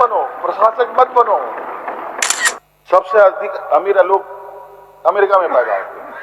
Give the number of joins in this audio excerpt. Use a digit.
1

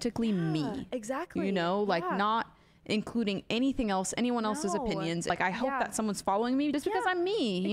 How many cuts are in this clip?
2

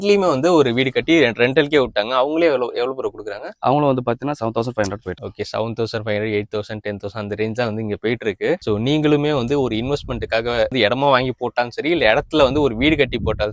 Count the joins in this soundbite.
0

